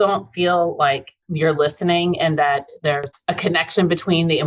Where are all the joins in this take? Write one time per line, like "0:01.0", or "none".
0:01.2
0:03.1